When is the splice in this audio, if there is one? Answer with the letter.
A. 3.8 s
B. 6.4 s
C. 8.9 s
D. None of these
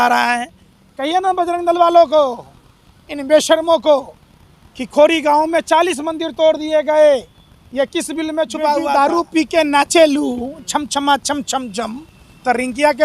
C